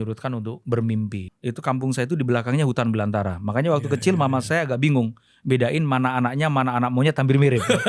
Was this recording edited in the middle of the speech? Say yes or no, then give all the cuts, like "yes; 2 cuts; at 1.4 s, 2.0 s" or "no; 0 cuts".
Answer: yes; 1 cut; at 1.3 s